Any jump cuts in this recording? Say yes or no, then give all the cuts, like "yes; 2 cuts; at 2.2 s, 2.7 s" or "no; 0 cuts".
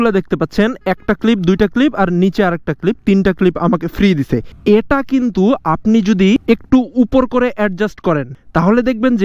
yes; 3 cuts; at 4.5 s, 6.4 s, 8.3 s